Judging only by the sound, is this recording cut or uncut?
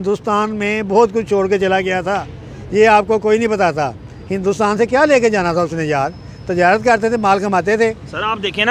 uncut